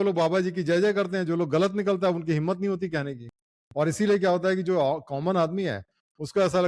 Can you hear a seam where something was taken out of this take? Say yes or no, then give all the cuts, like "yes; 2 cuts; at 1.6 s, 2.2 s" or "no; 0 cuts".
no; 0 cuts